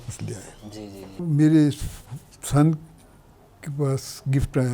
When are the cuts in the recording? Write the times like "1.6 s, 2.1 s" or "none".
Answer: 1.2 s